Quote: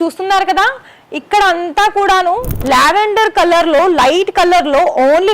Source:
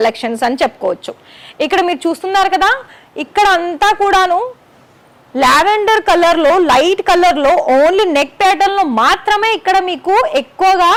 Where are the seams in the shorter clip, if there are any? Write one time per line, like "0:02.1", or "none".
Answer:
0:02.5